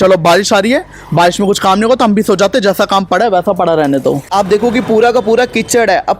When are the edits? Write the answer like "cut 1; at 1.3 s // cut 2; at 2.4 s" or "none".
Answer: cut 1; at 4.3 s